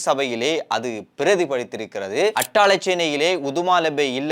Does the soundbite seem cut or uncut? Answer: cut